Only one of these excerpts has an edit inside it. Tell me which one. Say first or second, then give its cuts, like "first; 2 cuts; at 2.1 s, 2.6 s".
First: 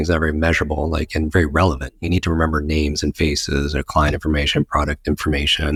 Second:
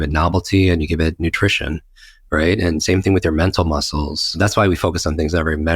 second; 1 cut; at 4.3 s